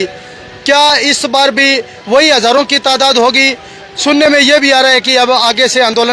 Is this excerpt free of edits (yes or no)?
yes